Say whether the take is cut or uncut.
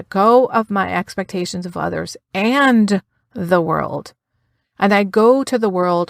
uncut